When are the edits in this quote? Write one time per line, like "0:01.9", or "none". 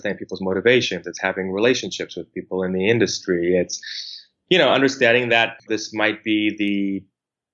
0:05.6

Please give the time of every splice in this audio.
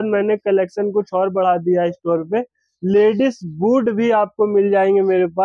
none

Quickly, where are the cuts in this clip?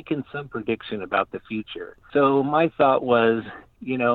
none

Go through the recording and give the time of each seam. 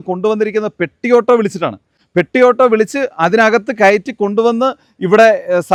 none

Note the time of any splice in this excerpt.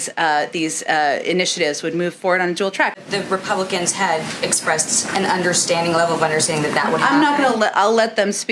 0:03.0

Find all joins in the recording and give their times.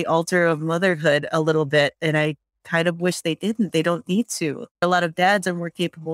0:04.8

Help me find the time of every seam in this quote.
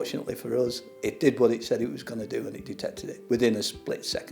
0:03.1

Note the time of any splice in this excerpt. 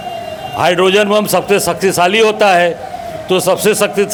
none

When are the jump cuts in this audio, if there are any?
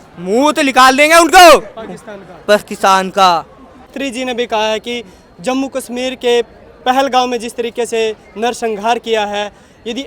0:04.0

